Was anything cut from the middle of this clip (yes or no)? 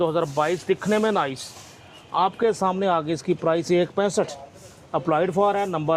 no